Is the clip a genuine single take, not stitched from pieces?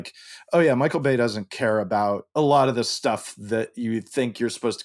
no; 1 cut; at 2.2 s

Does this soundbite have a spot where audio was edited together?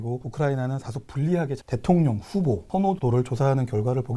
yes; 2 cuts; at 1.6 s, 3.0 s

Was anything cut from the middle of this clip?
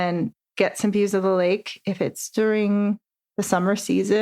no; 0 cuts

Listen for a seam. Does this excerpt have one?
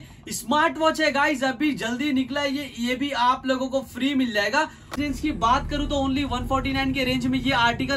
yes; 1 cut; at 4.9 s

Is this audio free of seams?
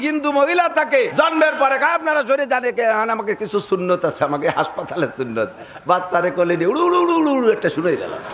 no; 1 cut; at 1.1 s

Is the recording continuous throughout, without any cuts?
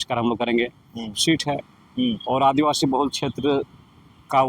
no; 1 cut; at 1.2 s

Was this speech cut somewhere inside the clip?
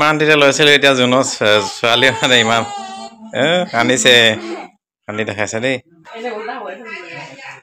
yes; 1 cut; at 6.1 s

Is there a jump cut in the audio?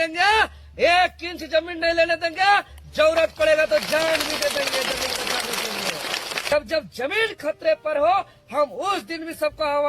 yes; 1 cut; at 6.5 s

